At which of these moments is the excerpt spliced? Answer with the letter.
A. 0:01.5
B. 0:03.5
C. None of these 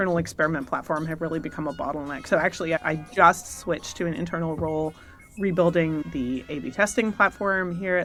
C